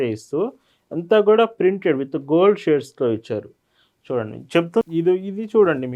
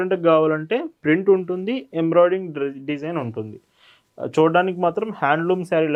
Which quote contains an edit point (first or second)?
first